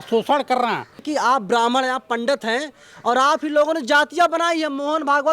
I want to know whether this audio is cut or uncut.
cut